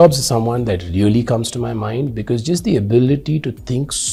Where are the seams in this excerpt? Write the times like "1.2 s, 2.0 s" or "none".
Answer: none